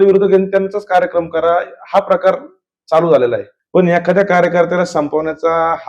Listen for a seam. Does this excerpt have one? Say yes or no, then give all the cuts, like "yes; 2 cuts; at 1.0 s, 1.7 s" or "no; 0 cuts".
yes; 1 cut; at 3.5 s